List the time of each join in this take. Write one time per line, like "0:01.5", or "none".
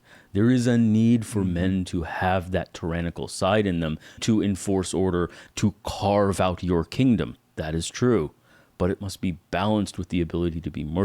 0:04.2
0:05.4